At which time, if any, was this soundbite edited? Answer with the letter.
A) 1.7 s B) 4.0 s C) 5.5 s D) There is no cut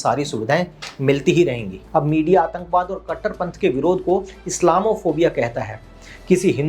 A